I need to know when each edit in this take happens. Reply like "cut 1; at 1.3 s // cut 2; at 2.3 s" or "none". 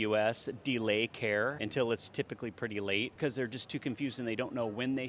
cut 1; at 1.6 s // cut 2; at 3.1 s